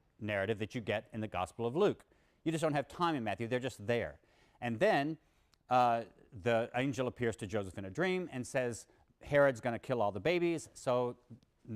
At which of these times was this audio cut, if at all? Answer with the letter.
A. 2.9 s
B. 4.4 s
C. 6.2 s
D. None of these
A